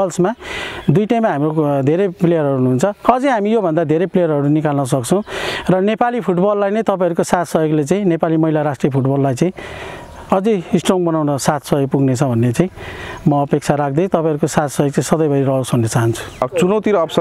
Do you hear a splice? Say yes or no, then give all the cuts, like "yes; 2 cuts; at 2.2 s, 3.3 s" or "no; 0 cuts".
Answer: yes; 1 cut; at 16.3 s